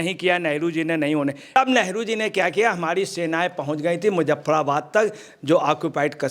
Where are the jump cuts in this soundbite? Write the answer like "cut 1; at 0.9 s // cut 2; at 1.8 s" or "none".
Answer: cut 1; at 1.6 s